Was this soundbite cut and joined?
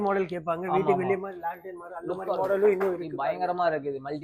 no; 0 cuts

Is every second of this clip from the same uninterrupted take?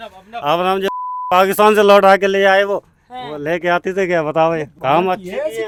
yes; 0 cuts

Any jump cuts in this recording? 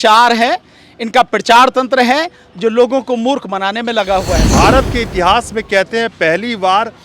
yes; 1 cut; at 4.4 s

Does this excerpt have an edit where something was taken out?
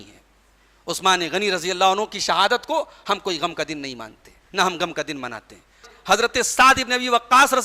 yes; 1 cut; at 5.9 s

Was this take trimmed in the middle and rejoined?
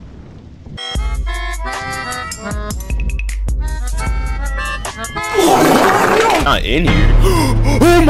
yes; 1 cut; at 6.5 s

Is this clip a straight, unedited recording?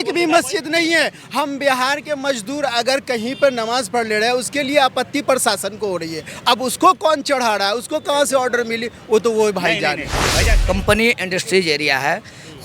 no; 1 cut; at 10.5 s

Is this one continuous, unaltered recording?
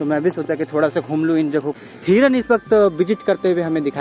no; 1 cut; at 1.7 s

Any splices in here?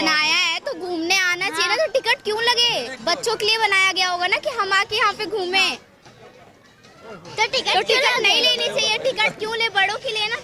no; 0 cuts

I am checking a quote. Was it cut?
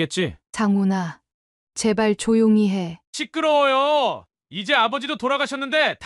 yes; 1 cut; at 3.0 s

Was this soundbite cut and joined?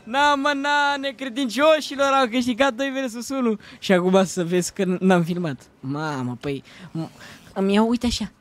no; 0 cuts

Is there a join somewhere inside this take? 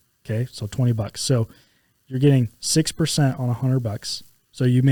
no; 0 cuts

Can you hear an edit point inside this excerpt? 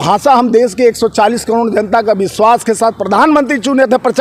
no; 0 cuts

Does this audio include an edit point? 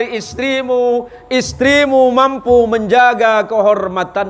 no; 0 cuts

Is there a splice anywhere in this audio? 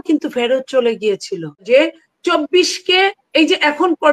yes; 1 cut; at 1.6 s

